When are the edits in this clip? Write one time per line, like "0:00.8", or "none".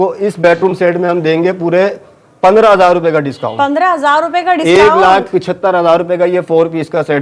none